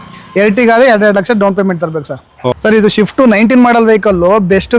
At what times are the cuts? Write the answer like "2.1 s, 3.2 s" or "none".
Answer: 2.6 s